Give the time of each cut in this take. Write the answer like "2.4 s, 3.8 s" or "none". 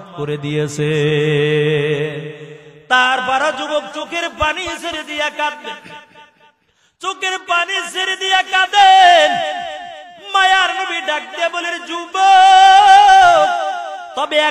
none